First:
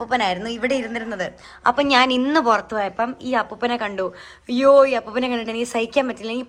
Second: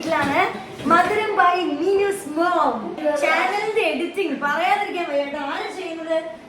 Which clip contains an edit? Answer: second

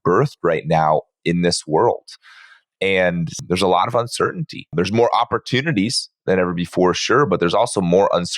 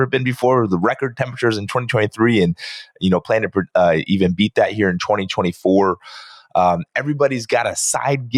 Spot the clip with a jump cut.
first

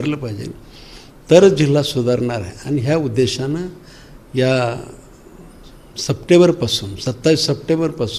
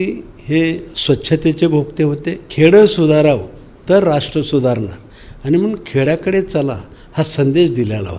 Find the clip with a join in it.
second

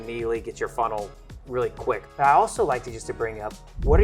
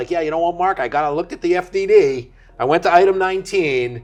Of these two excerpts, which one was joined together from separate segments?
first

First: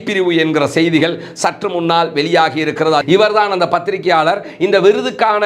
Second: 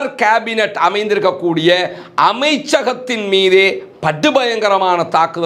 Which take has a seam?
first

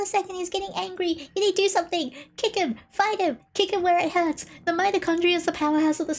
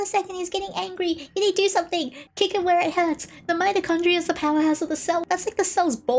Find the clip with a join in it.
second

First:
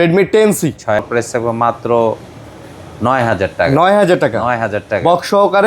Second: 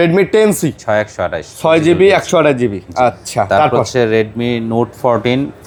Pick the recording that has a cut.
first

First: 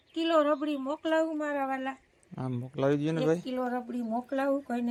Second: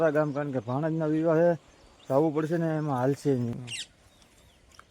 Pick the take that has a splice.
second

